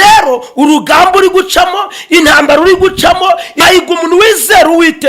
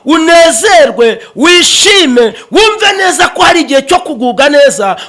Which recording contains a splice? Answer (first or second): first